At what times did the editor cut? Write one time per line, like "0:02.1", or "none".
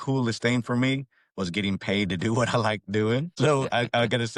none

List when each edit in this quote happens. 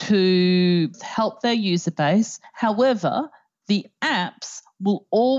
0:00.9
0:02.4

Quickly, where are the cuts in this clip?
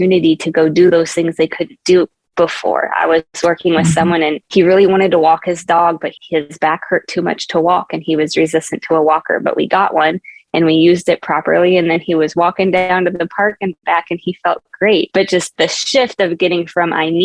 0:04.4
0:15.5

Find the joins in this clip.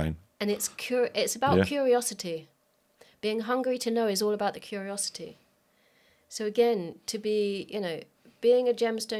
none

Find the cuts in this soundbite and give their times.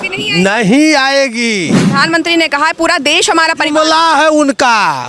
0:01.8

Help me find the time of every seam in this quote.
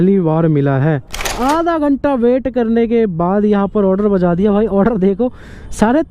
0:01.3

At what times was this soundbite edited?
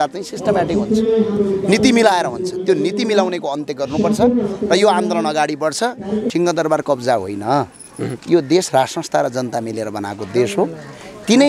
0:06.3

